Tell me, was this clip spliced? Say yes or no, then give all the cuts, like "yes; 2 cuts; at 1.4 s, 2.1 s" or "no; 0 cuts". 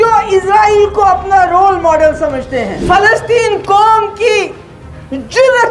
yes; 1 cut; at 2.7 s